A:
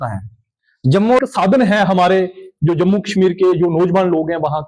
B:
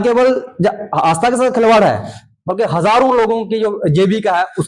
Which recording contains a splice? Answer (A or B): A